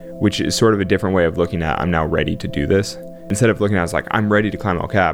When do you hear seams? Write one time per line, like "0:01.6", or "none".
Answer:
0:03.3